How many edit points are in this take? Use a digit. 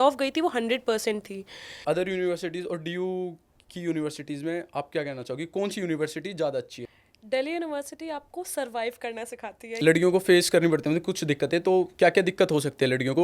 3